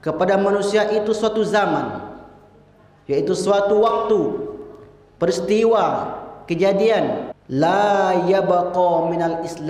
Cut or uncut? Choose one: cut